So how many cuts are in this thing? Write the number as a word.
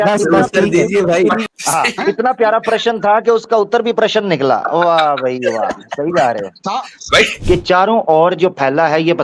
two